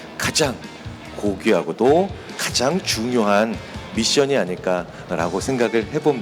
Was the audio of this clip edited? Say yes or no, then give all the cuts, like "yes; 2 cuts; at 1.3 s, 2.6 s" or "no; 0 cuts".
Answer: no; 0 cuts